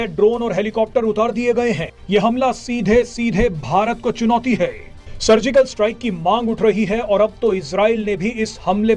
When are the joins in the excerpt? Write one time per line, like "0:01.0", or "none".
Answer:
0:01.9